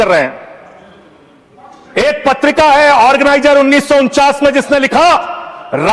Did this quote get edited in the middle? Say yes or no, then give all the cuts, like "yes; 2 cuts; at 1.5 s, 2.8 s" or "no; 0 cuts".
no; 0 cuts